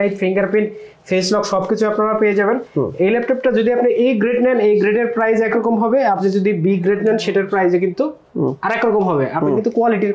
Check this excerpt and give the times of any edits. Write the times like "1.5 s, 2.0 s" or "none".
none